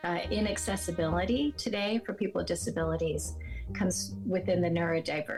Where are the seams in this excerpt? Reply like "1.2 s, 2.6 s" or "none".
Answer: none